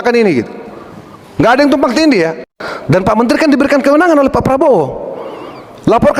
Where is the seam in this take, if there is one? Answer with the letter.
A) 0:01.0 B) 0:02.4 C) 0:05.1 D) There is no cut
B